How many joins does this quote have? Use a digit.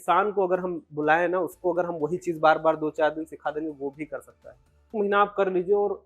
1